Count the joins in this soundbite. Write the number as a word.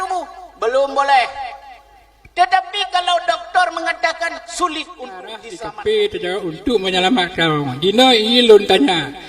one